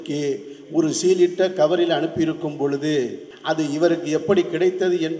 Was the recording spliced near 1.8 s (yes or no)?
no